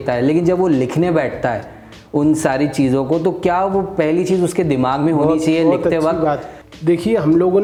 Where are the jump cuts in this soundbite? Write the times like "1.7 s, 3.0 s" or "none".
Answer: none